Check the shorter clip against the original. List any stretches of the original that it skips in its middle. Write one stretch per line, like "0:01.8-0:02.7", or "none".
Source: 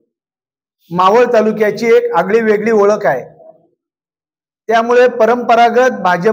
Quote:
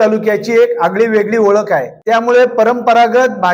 0:03.3-0:04.6